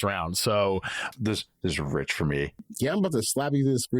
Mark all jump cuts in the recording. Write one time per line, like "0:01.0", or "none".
0:01.1
0:02.6